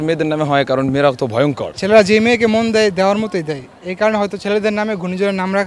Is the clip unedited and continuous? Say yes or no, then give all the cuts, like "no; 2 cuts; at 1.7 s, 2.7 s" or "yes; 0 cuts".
no; 1 cut; at 1.7 s